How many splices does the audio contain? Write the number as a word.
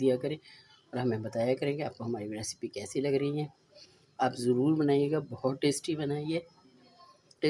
zero